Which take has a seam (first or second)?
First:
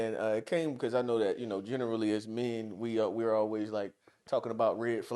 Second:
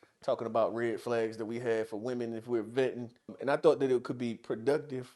second